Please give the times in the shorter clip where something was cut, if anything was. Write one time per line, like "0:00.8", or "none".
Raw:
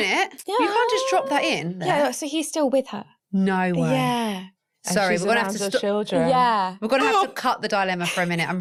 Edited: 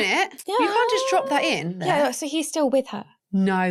none